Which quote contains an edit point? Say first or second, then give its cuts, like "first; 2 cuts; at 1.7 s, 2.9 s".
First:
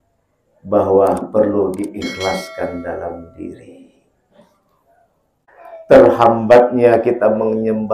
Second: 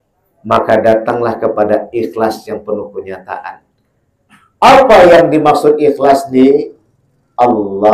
first; 1 cut; at 5.5 s